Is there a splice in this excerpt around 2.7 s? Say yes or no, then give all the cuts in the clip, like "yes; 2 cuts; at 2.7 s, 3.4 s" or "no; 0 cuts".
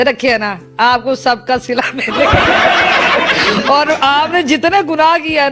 no; 0 cuts